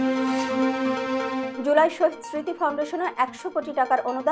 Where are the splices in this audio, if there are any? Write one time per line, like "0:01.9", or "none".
0:01.5